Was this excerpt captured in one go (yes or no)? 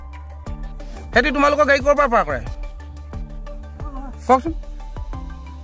no